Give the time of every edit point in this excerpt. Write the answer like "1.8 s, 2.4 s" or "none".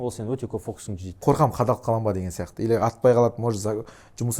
1.2 s